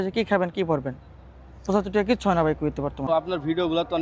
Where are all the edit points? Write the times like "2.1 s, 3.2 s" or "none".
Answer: 3.1 s